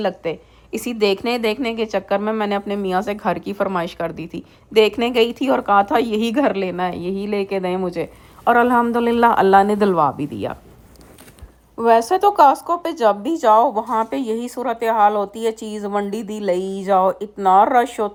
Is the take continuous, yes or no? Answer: yes